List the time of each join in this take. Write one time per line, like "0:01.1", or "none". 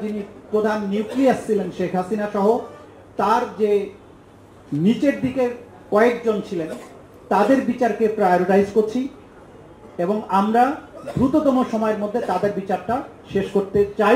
none